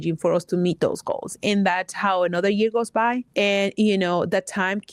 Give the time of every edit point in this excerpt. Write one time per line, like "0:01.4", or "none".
0:03.2